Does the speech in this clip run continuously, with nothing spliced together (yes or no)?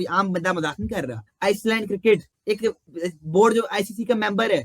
no